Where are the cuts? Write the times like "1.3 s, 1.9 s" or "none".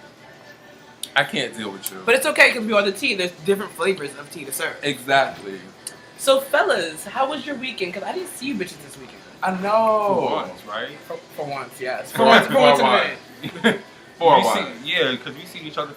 none